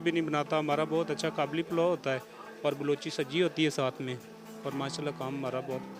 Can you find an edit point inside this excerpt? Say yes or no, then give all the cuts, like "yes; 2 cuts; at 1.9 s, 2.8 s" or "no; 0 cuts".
no; 0 cuts